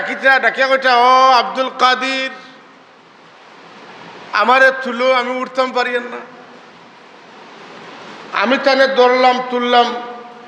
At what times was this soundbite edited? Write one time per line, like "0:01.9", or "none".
none